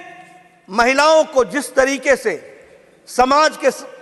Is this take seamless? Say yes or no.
yes